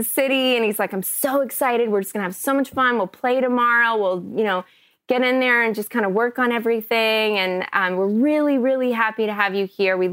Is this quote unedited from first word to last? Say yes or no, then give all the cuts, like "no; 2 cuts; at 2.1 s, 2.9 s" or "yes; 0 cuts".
yes; 0 cuts